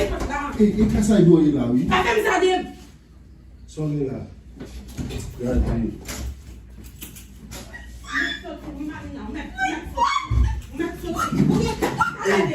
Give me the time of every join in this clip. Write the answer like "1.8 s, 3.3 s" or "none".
11.5 s